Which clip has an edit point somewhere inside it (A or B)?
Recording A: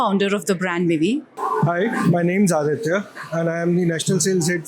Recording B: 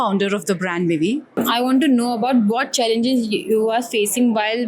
A